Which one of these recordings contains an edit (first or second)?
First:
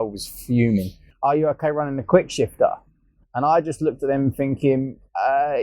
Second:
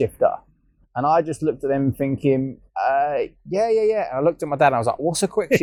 first